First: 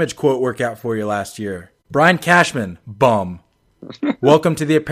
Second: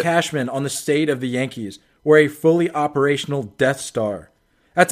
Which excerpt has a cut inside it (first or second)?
first